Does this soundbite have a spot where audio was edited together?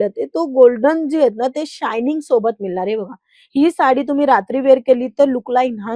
no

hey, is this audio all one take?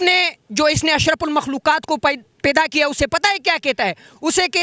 yes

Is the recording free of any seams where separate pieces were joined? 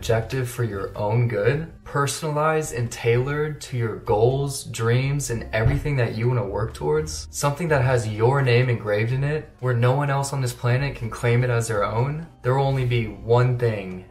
yes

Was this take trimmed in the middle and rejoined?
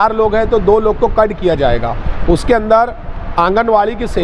no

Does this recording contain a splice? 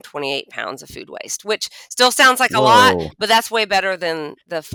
no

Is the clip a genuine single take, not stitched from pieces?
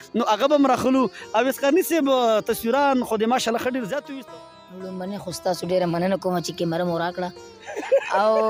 no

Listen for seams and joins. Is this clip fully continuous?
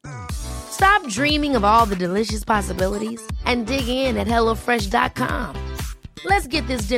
yes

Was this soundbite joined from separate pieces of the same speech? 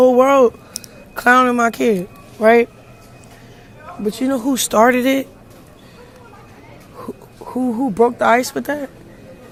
no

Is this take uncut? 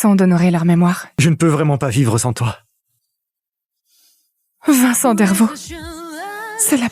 no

